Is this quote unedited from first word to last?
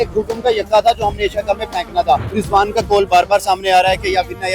no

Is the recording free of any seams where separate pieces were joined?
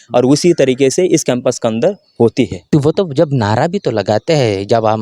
no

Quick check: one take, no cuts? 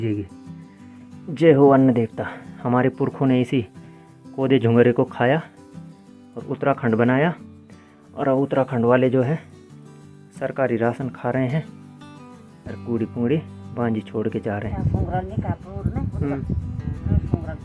no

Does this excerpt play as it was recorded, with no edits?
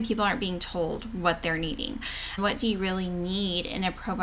no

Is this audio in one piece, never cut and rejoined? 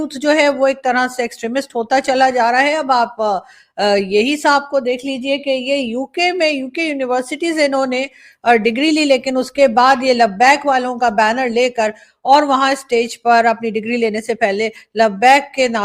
yes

